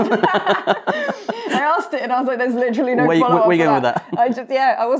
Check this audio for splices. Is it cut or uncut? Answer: uncut